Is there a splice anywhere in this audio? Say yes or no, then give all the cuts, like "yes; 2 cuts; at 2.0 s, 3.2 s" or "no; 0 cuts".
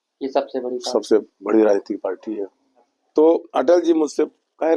yes; 1 cut; at 3.0 s